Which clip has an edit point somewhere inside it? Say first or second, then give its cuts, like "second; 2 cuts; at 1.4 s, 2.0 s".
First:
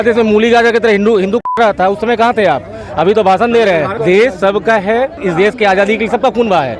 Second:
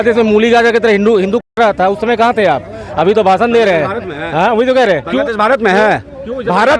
first; 2 cuts; at 4.0 s, 5.2 s